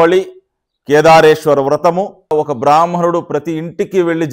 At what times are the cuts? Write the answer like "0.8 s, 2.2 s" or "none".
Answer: 2.3 s